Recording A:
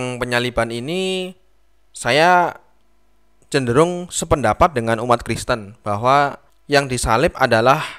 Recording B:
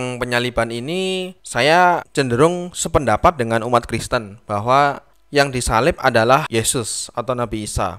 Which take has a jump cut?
B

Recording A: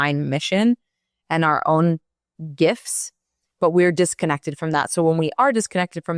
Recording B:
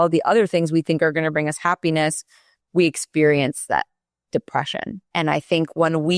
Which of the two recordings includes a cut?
B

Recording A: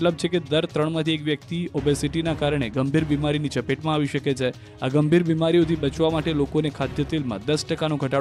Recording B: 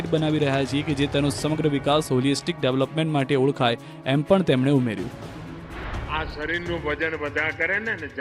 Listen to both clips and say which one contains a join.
B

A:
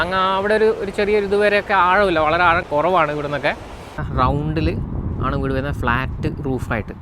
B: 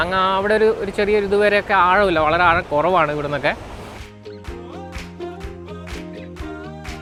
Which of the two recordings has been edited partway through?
A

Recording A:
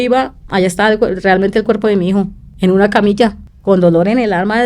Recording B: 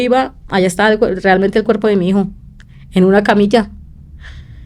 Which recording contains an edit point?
A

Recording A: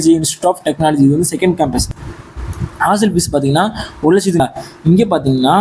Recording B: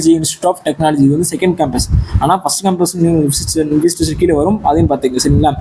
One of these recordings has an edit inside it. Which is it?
A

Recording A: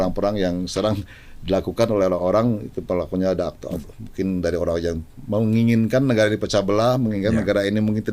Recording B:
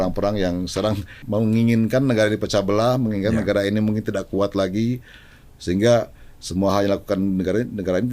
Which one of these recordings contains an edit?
B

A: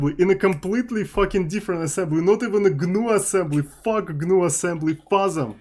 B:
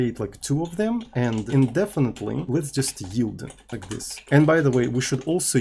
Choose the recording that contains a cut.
B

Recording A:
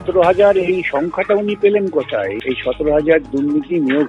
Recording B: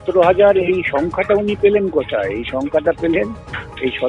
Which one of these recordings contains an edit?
A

